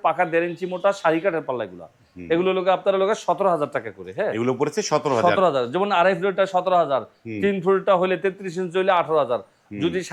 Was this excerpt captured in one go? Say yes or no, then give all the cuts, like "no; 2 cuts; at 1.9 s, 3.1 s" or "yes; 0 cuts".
yes; 0 cuts